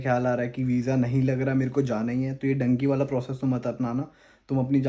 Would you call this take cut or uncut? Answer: uncut